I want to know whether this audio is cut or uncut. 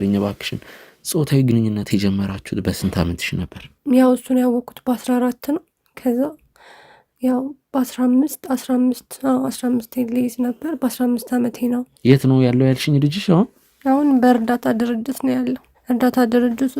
cut